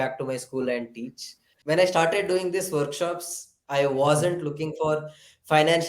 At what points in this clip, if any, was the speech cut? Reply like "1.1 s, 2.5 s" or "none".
1.5 s